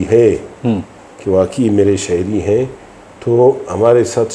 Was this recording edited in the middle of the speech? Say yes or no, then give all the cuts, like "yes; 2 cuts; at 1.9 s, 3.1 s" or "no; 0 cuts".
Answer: no; 0 cuts